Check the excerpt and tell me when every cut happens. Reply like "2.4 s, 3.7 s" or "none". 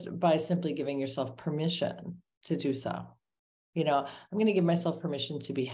none